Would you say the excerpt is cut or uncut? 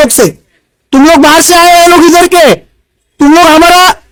uncut